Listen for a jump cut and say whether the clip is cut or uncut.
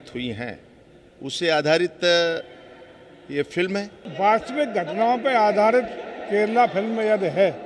cut